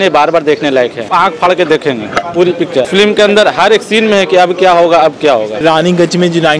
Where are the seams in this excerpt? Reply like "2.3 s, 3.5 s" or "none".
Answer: 1.1 s, 2.9 s, 5.6 s